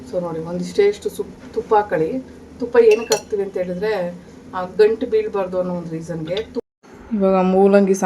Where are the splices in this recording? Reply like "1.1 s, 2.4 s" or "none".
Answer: 6.7 s